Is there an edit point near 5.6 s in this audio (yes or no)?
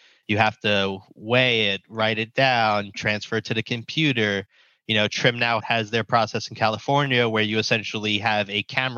yes